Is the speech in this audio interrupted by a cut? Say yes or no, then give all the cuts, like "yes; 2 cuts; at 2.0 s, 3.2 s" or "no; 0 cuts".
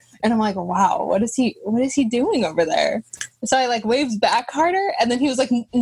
no; 0 cuts